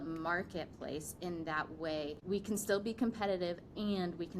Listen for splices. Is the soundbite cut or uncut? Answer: cut